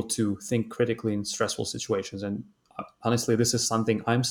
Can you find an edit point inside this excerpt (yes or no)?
no